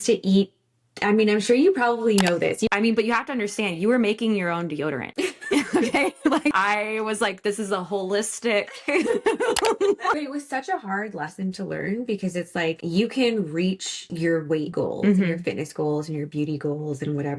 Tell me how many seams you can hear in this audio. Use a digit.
3